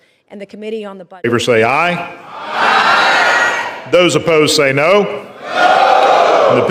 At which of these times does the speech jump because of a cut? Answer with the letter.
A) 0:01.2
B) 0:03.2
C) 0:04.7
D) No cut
A